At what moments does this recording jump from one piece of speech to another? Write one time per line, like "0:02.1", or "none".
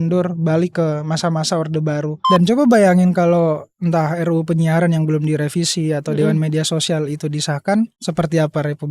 0:02.2
0:08.0